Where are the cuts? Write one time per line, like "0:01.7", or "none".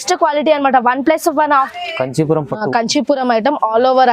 0:01.7